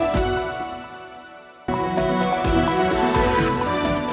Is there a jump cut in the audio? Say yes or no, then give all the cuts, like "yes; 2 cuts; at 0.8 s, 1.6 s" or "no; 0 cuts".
yes; 1 cut; at 1.9 s